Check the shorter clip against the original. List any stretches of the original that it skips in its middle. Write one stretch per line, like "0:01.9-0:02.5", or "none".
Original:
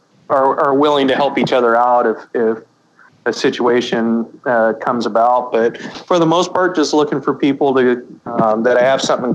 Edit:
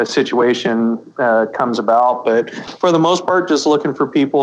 none

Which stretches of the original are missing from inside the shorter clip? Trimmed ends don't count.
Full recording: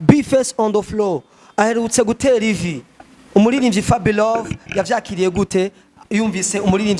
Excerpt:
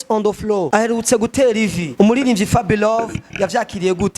0:01.3-0:01.7
0:02.7-0:03.2

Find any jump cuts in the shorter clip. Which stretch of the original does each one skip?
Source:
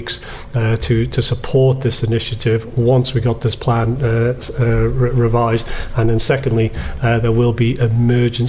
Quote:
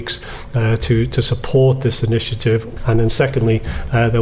0:02.7-0:05.8

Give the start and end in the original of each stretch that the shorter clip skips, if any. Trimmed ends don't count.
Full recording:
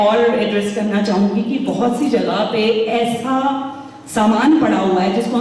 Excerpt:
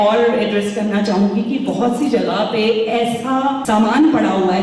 0:03.6-0:04.1

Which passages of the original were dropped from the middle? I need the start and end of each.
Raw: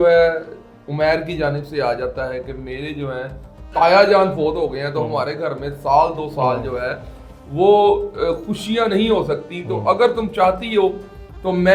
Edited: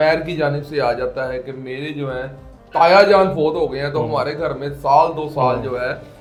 none

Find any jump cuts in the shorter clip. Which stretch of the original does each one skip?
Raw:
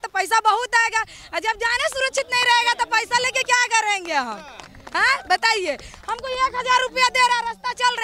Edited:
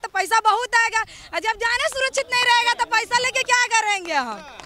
none

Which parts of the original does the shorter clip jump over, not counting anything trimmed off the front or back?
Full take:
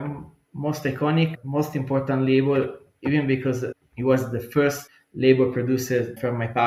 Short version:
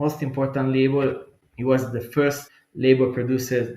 0:02.9-0:03.7

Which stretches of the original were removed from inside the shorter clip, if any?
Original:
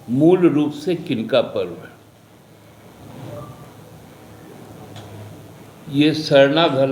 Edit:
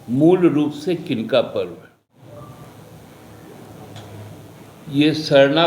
0:02.2-0:03.2

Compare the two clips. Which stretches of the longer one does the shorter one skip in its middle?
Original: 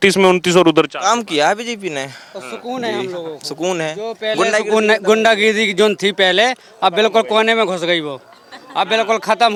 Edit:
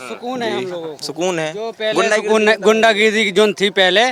none

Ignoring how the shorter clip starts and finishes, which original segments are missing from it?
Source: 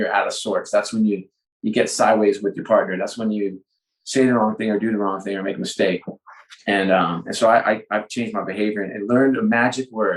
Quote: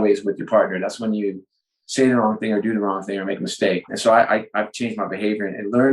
0:06.1-0:07.3

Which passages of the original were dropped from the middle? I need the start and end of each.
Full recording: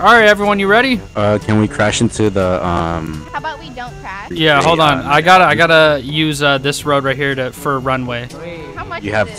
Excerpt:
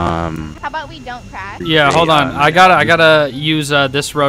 none

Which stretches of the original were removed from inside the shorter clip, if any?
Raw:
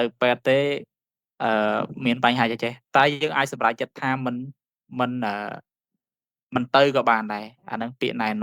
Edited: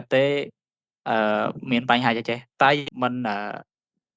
0:03.2-0:04.8

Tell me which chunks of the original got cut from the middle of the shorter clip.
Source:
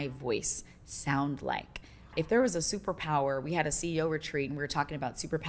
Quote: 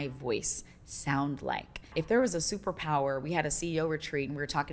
0:01.8-0:02.0

